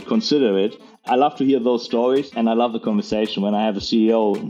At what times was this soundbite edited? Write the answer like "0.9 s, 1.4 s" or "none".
1.0 s, 2.3 s